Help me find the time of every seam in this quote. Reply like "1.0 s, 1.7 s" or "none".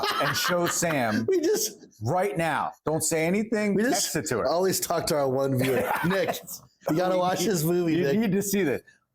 6.8 s